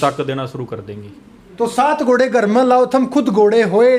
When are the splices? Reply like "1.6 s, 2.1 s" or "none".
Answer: none